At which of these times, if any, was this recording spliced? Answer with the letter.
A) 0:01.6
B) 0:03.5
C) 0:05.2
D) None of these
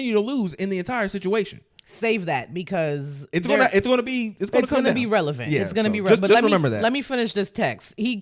D